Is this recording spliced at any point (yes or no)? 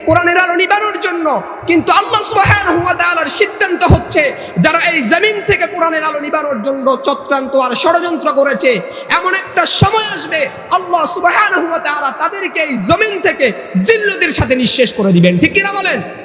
no